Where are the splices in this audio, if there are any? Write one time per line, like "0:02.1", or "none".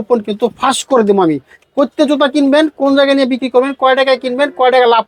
none